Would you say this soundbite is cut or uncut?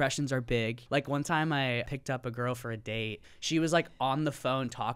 cut